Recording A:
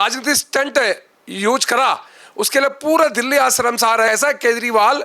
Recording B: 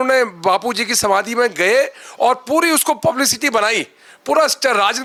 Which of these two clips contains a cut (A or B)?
A